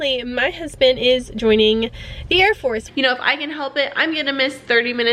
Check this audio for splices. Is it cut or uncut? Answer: cut